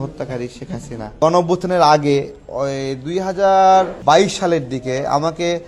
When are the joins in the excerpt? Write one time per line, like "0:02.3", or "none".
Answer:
0:01.2
0:03.9

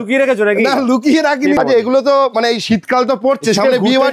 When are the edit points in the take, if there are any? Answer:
0:01.6

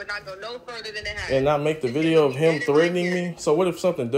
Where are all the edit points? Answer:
none

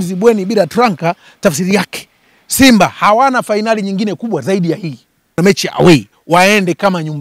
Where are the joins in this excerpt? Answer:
0:05.4

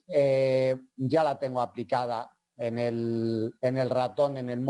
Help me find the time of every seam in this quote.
0:01.3

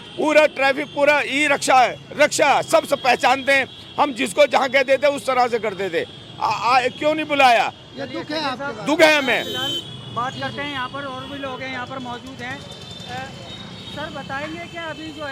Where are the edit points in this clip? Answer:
none

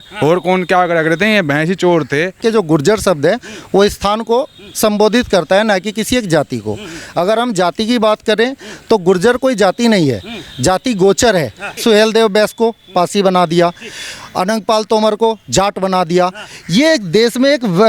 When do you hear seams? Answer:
0:02.4
0:11.7

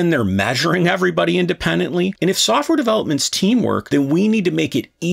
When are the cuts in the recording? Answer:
0:02.1
0:03.8

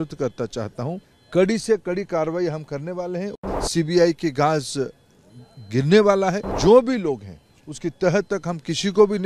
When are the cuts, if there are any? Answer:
0:01.1
0:03.4
0:06.5

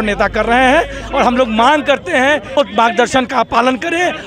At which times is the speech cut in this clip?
0:02.6

